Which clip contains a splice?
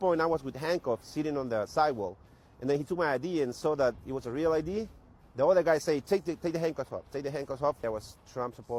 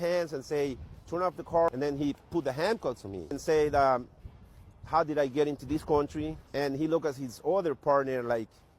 second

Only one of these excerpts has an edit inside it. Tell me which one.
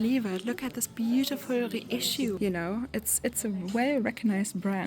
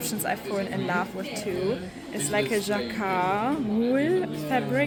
first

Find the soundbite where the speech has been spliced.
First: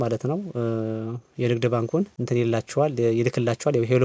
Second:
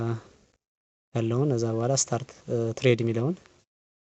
first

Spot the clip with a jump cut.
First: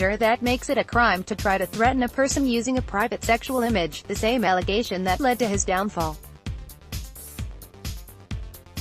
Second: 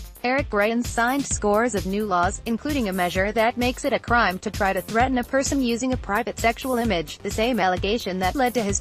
first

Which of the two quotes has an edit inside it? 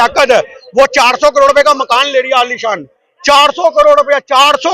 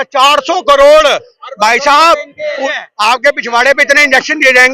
second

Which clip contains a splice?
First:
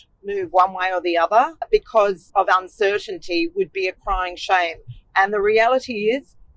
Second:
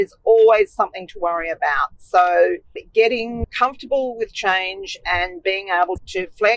first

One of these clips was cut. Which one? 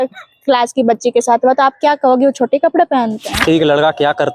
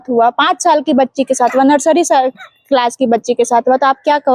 first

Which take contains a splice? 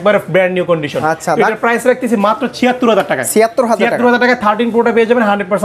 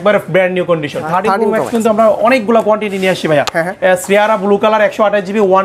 second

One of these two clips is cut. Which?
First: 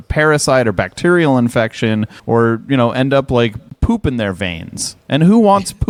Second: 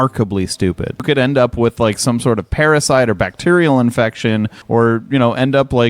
second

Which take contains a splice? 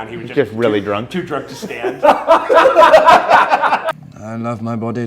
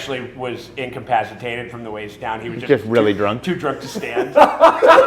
first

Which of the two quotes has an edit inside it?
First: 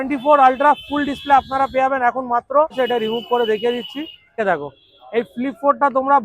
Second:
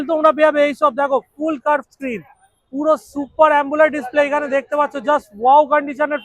first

